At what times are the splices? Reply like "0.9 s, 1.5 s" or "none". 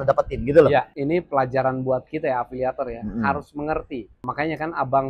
0.9 s